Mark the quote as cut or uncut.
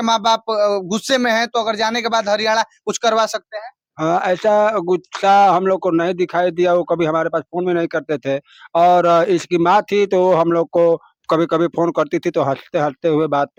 uncut